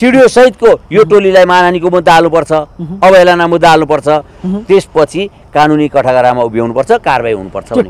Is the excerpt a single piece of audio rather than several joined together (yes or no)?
yes